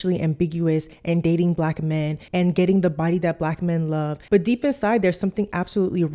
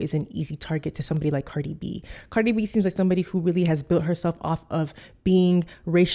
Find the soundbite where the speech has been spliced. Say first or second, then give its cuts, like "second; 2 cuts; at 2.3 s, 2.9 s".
first; 2 cuts; at 2.2 s, 4.2 s